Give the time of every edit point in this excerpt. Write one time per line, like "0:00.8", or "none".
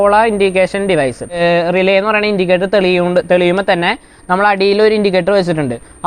0:01.4